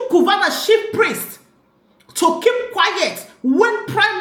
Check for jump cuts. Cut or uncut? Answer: uncut